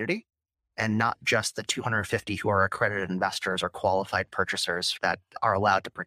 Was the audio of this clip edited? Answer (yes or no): yes